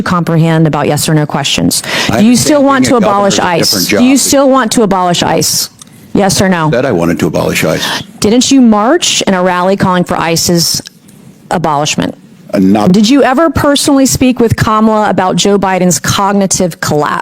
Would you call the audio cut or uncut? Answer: cut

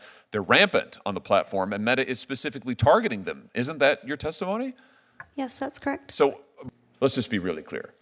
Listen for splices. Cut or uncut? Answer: cut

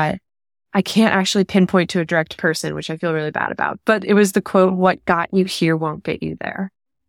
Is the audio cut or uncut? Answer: uncut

